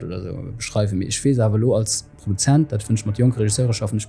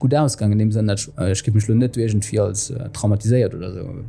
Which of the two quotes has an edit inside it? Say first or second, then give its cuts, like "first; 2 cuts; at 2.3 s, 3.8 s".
second; 1 cut; at 1.1 s